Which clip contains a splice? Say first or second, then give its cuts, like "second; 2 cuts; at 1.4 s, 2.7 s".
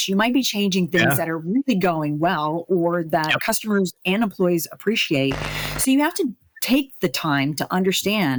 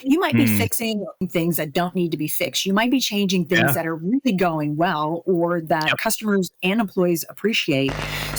second; 1 cut; at 1.2 s